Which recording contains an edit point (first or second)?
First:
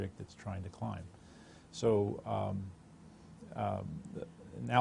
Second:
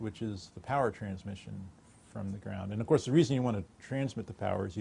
first